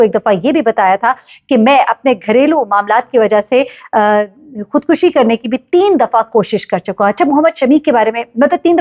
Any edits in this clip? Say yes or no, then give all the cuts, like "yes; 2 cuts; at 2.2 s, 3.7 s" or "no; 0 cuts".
no; 0 cuts